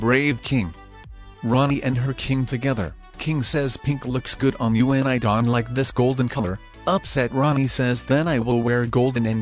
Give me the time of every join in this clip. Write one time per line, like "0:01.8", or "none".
none